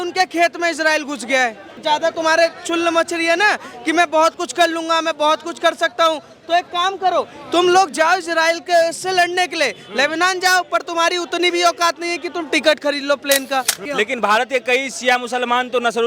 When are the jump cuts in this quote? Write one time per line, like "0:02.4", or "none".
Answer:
0:01.8
0:13.8